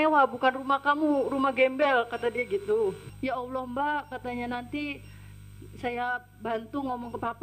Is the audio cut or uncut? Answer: cut